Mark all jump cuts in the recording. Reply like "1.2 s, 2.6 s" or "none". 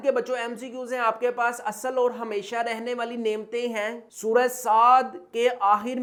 none